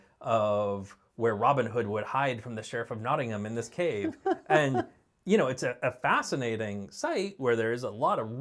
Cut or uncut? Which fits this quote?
uncut